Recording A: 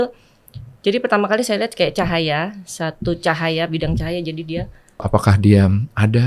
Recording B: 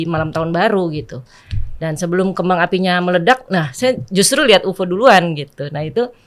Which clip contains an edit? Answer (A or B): A